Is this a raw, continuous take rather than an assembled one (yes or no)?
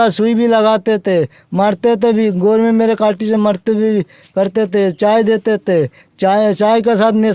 yes